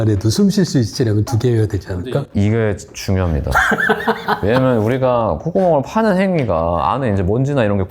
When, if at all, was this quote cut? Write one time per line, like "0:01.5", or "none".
none